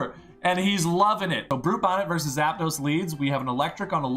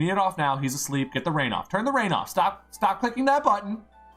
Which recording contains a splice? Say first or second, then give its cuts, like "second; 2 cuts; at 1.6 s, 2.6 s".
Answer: first; 1 cut; at 1.4 s